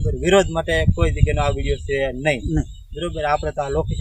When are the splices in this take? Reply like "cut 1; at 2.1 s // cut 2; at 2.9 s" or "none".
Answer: none